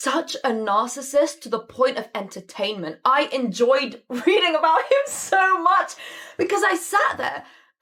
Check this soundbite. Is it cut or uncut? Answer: uncut